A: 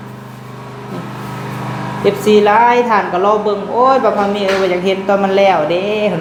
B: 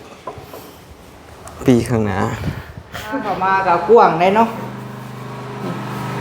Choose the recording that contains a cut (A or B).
B